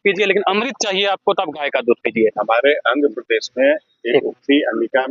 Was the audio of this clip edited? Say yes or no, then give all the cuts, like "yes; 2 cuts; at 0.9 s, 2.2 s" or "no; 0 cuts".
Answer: no; 0 cuts